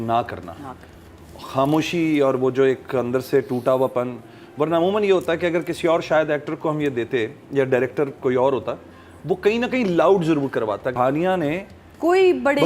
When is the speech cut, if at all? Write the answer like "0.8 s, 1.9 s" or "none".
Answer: 10.9 s